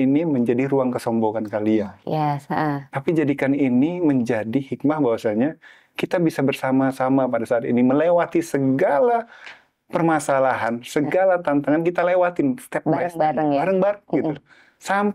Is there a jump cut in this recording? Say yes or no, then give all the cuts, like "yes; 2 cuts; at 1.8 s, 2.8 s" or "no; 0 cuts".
no; 0 cuts